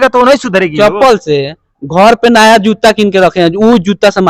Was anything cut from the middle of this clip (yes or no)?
no